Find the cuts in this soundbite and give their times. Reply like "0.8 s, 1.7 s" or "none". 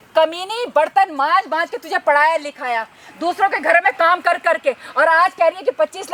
none